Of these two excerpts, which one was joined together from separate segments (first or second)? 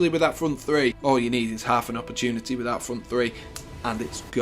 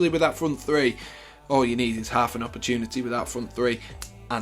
first